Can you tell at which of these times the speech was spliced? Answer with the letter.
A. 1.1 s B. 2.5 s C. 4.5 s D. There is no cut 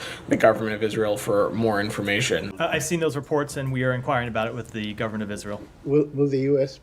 B